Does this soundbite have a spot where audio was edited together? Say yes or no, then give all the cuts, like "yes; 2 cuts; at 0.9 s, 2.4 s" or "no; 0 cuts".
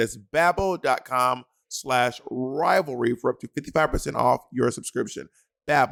no; 0 cuts